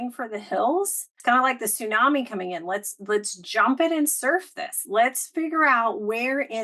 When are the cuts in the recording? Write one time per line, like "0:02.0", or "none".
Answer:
0:01.0